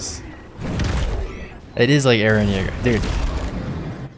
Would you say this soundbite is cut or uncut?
uncut